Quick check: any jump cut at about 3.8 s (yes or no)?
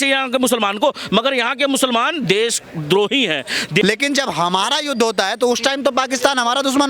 yes